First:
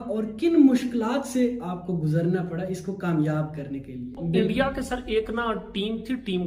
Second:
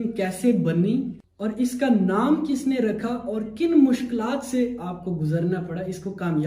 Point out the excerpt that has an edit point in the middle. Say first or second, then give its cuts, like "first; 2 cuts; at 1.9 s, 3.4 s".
first; 1 cut; at 4.2 s